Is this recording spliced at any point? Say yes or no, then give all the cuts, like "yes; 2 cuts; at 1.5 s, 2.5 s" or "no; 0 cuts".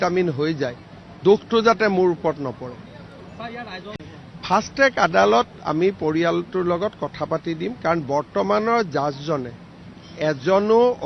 yes; 1 cut; at 3.8 s